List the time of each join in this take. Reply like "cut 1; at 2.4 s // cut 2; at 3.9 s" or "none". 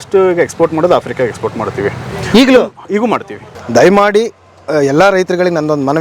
cut 1; at 3.5 s